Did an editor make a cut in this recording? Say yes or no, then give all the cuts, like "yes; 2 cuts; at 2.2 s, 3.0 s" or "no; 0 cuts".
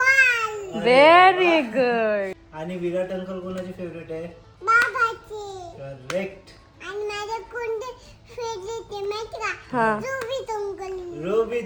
no; 0 cuts